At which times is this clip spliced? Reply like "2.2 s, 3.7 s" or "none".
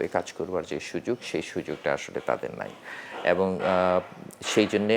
none